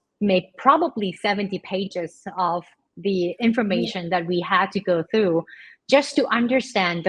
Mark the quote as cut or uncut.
uncut